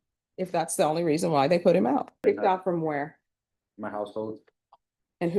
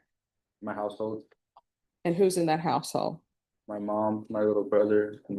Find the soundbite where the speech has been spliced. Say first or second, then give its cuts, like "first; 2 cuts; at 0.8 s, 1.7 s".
first; 1 cut; at 2.2 s